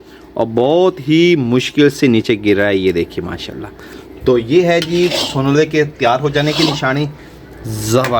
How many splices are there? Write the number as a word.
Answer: one